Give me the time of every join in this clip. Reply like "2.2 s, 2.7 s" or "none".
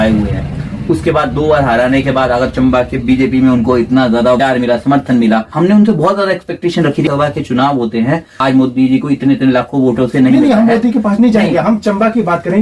4.4 s, 5.5 s, 7.1 s, 8.3 s